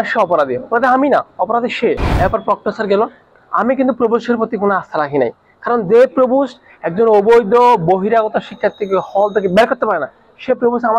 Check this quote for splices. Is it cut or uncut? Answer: cut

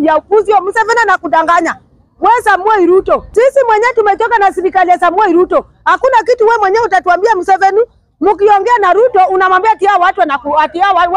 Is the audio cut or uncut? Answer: cut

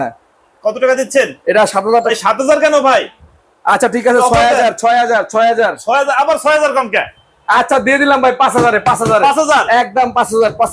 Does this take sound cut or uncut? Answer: cut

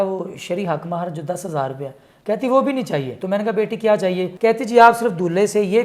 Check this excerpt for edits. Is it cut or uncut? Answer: cut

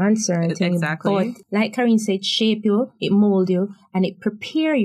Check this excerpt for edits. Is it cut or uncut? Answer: cut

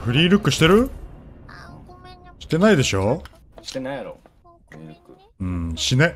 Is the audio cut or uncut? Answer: uncut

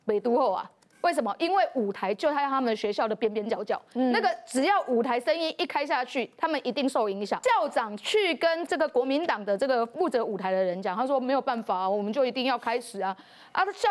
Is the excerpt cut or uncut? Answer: cut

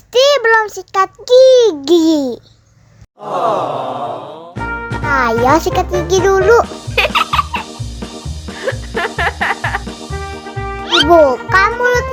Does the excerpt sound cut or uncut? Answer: uncut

